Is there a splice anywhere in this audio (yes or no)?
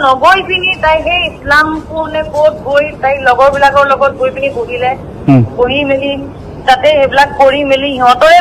no